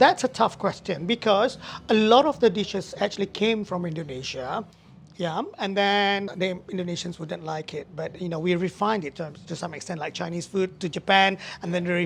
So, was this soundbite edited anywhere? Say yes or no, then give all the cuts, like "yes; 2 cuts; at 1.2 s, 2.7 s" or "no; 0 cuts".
no; 0 cuts